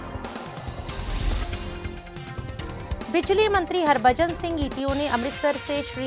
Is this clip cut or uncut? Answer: uncut